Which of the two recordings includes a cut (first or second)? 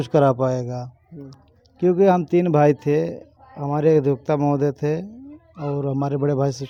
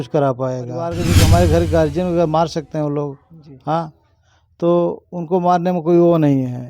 second